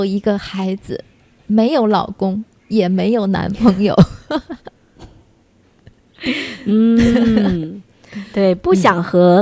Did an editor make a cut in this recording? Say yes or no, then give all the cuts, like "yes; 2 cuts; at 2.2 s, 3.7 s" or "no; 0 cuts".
no; 0 cuts